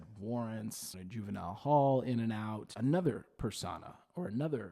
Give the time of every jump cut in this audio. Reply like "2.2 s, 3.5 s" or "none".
0.9 s, 2.7 s